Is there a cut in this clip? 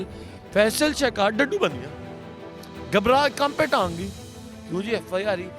no; 0 cuts

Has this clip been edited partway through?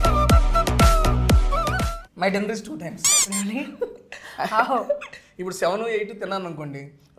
yes; 1 cut; at 1.9 s

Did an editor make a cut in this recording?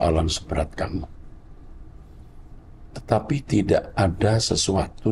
no; 0 cuts

